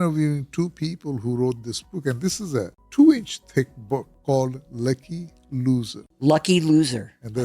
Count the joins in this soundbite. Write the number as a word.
three